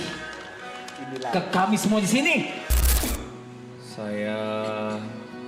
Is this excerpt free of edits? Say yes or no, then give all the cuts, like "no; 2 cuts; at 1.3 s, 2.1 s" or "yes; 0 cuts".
no; 1 cut; at 3.0 s